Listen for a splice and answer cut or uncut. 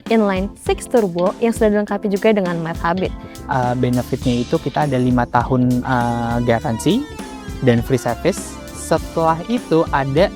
cut